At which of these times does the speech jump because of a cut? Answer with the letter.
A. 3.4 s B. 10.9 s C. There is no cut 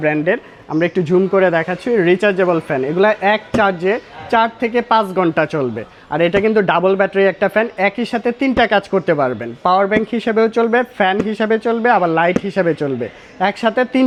C